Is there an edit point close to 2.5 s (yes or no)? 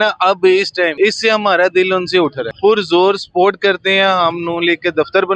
yes